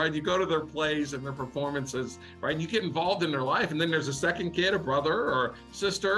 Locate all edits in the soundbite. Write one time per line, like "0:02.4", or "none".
none

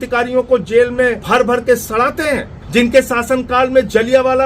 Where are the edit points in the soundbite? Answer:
0:01.2
0:02.6

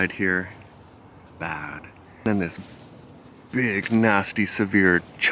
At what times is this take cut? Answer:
0:02.3

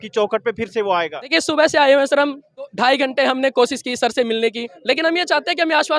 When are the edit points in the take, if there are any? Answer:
0:01.3
0:02.7
0:04.7

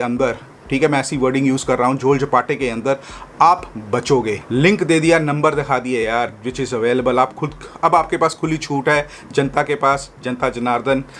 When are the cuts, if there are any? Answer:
0:04.4

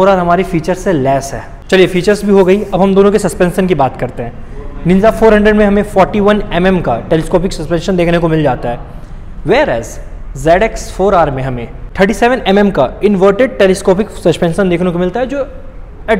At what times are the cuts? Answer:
none

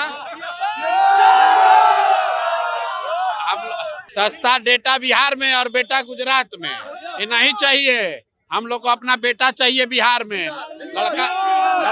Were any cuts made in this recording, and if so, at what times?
0:04.0

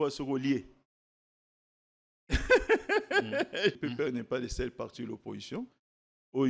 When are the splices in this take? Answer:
0:03.7

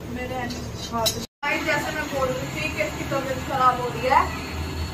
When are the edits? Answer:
0:01.2

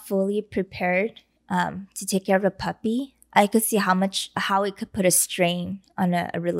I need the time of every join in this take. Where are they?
none

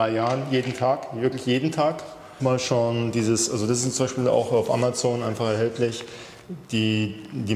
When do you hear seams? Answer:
0:02.3

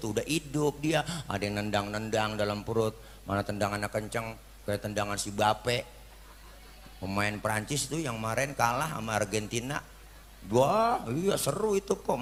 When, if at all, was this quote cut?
none

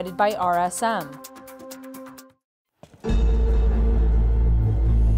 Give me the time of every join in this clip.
0:01.1
0:02.2

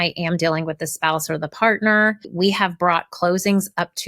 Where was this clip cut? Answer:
0:02.2

